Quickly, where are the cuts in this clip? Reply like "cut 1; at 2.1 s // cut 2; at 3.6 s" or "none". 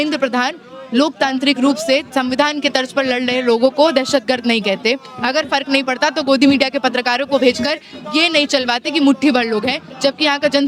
none